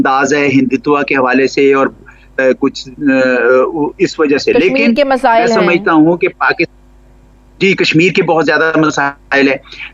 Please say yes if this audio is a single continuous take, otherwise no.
yes